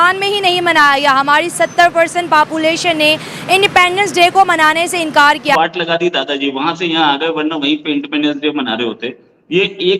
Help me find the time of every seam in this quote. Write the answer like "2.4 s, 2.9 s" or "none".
5.6 s